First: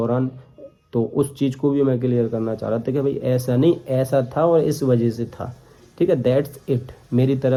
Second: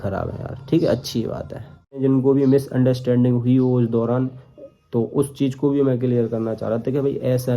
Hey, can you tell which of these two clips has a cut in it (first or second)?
second